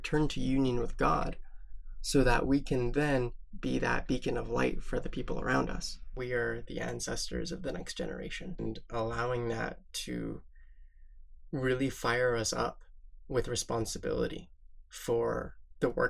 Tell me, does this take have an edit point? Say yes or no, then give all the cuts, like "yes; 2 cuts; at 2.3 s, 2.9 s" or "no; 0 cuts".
yes; 2 cuts; at 6.1 s, 8.6 s